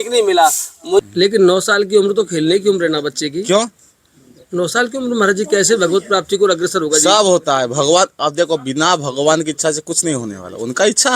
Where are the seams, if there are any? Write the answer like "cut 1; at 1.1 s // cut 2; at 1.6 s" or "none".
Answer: cut 1; at 1.0 s